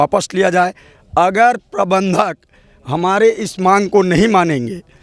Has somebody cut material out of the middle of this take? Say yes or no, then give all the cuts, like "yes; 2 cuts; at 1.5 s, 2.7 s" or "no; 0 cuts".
no; 0 cuts